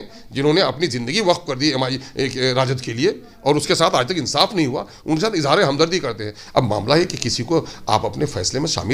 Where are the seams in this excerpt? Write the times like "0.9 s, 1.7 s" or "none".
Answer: none